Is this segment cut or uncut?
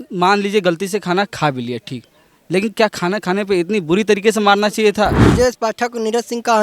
cut